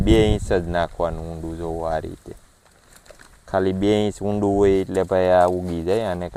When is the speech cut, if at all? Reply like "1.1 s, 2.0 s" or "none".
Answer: none